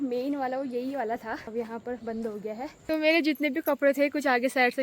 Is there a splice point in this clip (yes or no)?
yes